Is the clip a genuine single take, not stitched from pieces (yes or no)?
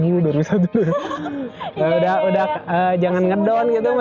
yes